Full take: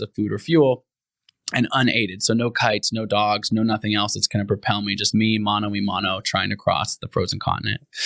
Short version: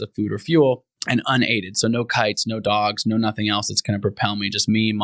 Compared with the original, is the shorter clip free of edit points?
no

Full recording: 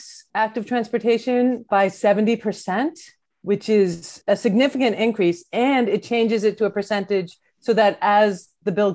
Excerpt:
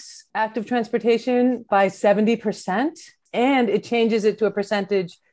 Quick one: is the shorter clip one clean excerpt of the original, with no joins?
no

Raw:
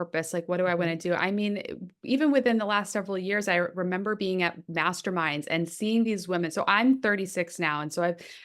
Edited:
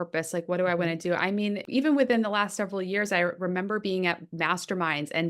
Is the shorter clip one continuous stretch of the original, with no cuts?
no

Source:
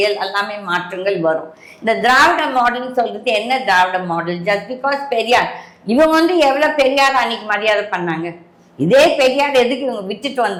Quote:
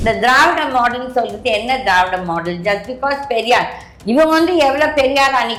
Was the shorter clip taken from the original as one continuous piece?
yes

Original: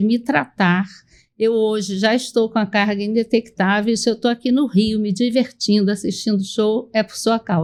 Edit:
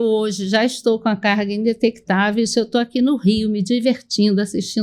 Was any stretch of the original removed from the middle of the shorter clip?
no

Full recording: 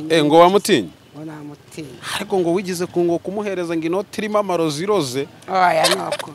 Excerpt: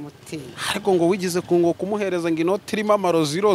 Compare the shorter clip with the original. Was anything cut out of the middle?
no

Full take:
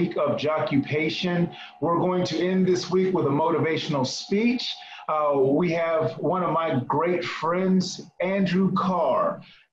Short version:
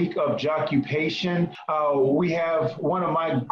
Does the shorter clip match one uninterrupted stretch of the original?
no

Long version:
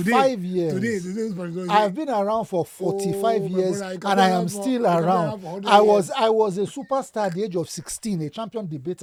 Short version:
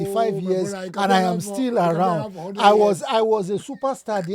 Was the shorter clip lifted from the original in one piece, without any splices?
yes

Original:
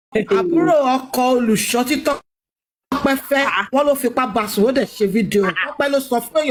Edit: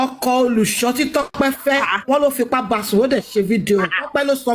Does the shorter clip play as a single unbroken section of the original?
no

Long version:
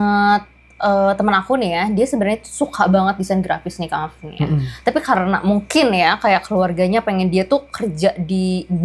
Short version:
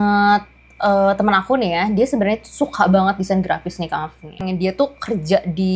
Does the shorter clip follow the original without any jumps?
no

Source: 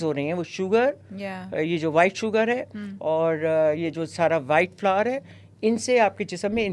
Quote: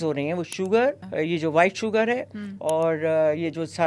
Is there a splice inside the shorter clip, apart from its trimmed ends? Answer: yes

